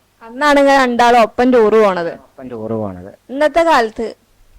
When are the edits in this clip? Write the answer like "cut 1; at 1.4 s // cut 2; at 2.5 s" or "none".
cut 1; at 3.1 s